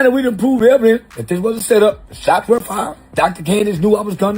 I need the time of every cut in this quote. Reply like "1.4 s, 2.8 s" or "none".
1.1 s, 2.1 s, 3.0 s